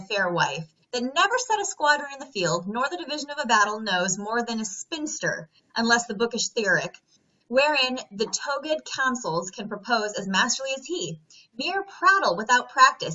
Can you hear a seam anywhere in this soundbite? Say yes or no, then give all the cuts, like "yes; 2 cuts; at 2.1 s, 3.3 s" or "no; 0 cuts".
yes; 1 cut; at 2.4 s